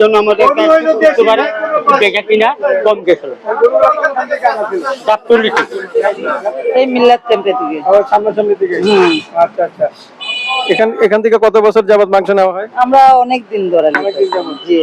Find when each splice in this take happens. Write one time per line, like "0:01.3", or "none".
0:06.5